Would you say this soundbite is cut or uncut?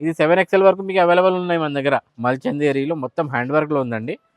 cut